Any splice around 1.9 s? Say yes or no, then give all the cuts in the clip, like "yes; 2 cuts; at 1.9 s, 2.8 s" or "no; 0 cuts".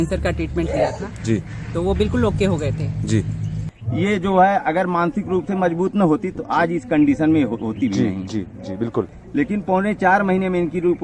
no; 2 cuts; at 3.7 s, 9.2 s